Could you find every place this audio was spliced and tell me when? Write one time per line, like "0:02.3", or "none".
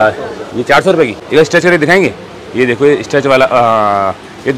0:01.2